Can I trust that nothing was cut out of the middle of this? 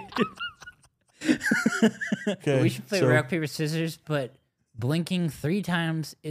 no; 1 cut; at 2.4 s

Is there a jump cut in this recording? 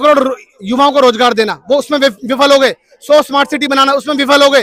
no; 0 cuts

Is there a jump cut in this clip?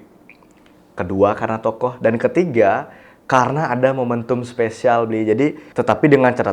yes; 1 cut; at 5.6 s

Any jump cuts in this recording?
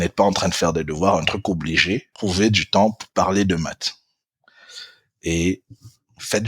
yes; 1 cut; at 2.1 s

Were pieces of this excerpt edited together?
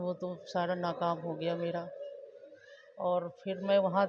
no; 0 cuts

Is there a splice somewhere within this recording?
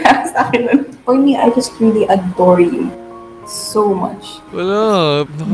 yes; 2 cuts; at 0.9 s, 4.4 s

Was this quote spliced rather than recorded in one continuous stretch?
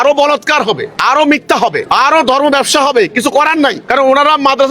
yes; 3 cuts; at 0.9 s, 1.8 s, 3.8 s

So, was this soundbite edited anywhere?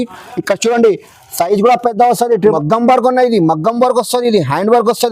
yes; 1 cut; at 2.4 s

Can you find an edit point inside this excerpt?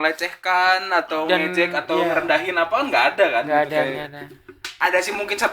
no; 0 cuts

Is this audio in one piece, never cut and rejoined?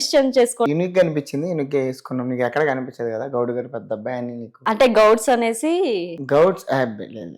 yes; 0 cuts

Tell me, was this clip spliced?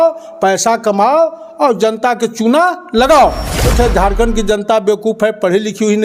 yes; 1 cut; at 3.7 s

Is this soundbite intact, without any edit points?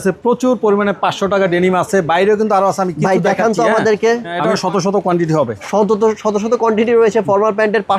no; 1 cut; at 4.4 s

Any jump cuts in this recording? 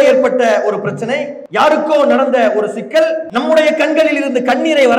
yes; 2 cuts; at 1.4 s, 3.3 s

